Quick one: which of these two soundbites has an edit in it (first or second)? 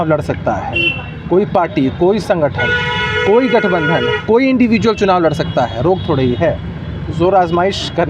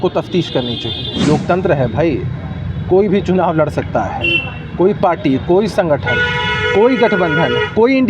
second